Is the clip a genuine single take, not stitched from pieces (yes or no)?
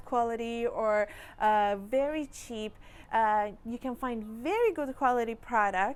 yes